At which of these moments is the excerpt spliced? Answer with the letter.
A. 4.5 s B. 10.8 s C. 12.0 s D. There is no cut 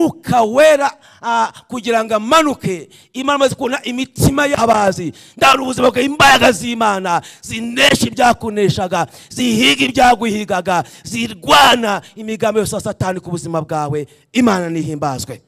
A